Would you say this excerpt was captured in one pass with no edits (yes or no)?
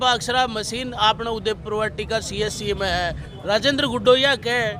no